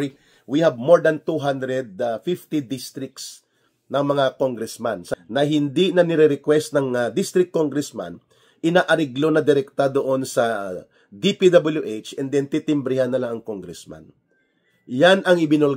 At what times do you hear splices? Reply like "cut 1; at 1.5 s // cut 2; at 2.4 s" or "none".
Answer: cut 1; at 5.1 s